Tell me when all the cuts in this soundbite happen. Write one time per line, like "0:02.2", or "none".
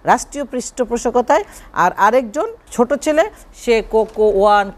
0:02.6